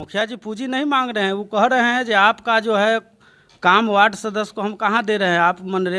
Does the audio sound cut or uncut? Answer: uncut